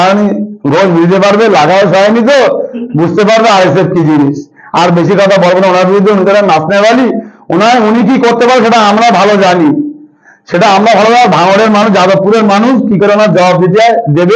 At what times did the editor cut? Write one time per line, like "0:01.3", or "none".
none